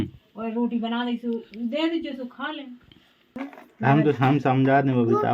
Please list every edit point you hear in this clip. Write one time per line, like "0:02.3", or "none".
0:03.2